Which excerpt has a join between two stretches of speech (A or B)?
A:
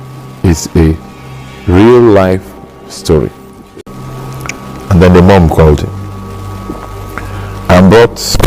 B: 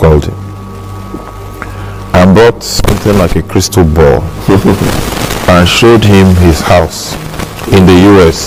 A